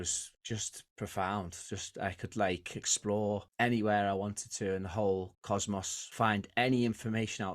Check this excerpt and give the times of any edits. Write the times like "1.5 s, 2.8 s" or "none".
6.0 s